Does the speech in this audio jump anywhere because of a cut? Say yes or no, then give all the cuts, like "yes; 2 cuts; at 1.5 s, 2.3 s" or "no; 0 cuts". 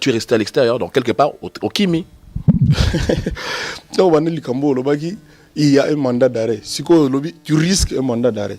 no; 0 cuts